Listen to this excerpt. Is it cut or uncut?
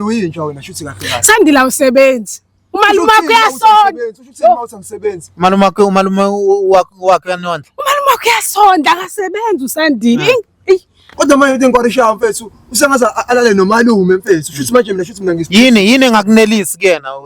cut